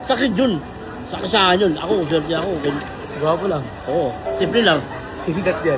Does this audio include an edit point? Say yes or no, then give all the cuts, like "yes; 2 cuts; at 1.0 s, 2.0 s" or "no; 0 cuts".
no; 0 cuts